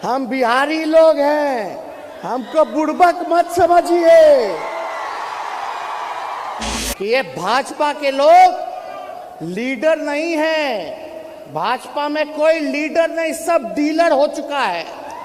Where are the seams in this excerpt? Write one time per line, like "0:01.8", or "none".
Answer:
0:06.8